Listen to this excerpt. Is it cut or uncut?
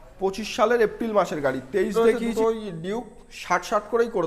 cut